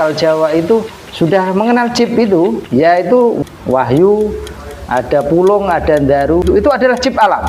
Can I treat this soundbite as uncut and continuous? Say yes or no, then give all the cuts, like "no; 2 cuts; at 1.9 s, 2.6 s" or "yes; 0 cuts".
no; 4 cuts; at 1.0 s, 2.6 s, 3.4 s, 6.4 s